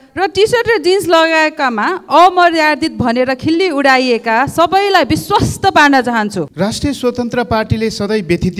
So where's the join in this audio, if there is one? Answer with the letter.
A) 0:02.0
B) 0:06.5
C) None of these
B